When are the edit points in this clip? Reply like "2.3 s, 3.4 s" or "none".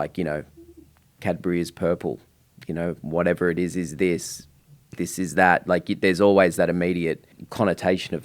7.4 s